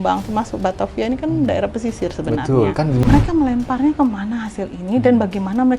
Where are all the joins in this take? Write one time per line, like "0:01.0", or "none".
0:03.0